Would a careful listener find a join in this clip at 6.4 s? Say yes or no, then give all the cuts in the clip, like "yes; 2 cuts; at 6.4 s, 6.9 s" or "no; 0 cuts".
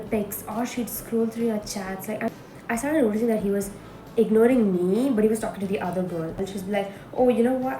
yes; 2 cuts; at 2.3 s, 6.4 s